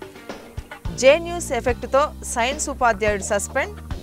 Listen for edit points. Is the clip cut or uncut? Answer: cut